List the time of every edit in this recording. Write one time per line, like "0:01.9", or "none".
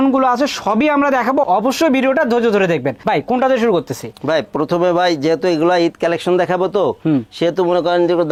none